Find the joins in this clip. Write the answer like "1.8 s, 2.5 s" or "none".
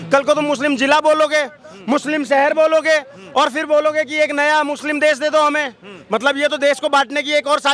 none